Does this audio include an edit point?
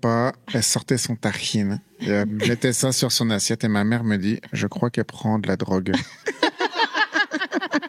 no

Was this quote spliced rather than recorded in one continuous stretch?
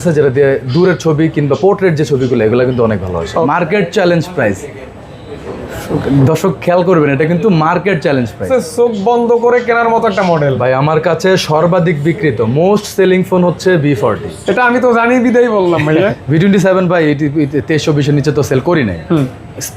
yes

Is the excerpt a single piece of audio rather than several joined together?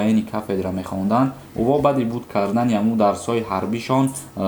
yes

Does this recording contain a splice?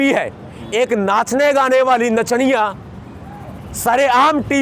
no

